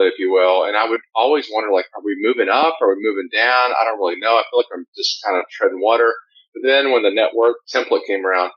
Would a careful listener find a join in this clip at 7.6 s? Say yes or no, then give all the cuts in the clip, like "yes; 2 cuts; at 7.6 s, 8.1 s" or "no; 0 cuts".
yes; 1 cut; at 7.6 s